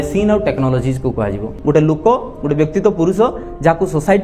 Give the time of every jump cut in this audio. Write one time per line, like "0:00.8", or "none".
0:01.5